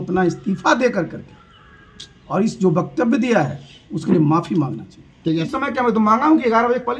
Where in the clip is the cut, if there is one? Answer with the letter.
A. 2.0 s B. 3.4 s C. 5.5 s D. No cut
C